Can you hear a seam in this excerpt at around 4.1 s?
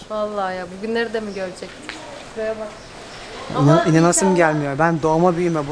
no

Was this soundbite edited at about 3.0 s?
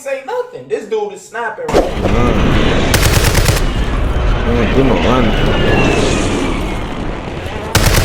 no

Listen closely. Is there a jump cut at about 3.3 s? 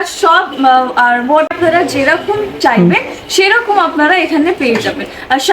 no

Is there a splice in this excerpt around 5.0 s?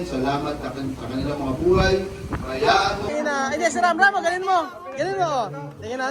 no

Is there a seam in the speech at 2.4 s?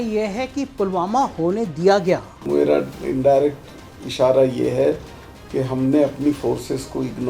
yes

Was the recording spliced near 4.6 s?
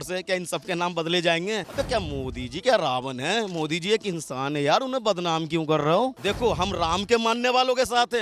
no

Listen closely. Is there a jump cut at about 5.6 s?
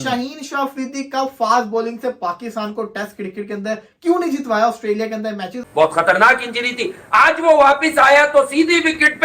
yes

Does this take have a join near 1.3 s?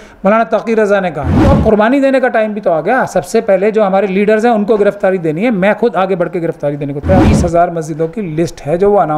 yes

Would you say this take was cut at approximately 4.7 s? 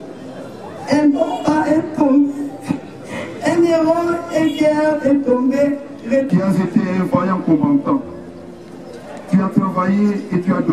no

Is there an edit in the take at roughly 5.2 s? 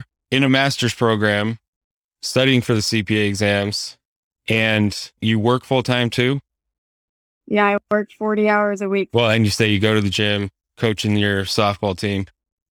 yes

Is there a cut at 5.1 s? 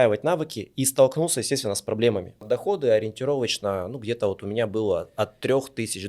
no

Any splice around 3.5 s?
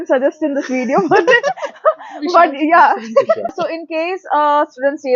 yes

